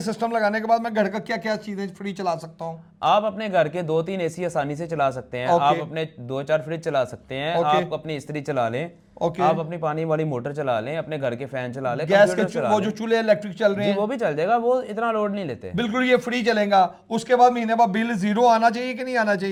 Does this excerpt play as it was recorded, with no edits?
yes; 0 cuts

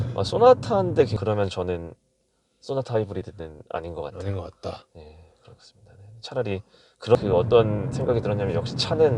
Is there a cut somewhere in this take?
yes; 2 cuts; at 1.1 s, 7.2 s

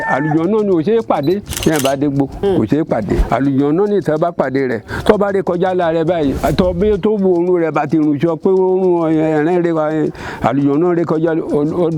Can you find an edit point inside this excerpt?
yes; 4 cuts; at 1.5 s, 2.3 s, 3.2 s, 6.4 s

